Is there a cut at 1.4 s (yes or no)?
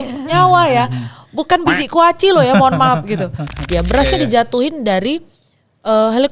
no